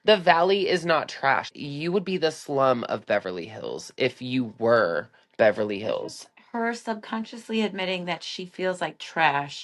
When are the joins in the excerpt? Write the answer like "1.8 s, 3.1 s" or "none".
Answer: 1.5 s